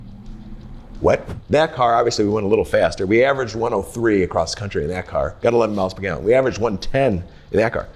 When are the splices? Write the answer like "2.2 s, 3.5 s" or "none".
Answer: 1.3 s